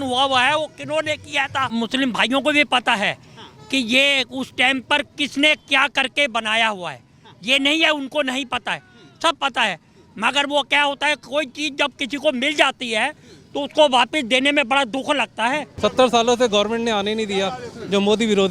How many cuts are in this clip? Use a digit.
2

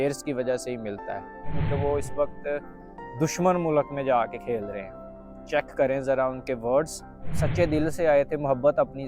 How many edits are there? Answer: 2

